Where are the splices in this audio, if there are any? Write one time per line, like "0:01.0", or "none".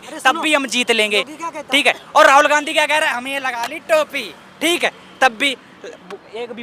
none